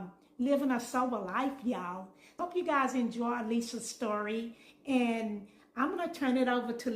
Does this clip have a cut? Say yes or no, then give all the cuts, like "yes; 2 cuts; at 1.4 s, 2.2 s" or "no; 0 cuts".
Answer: yes; 1 cut; at 2.4 s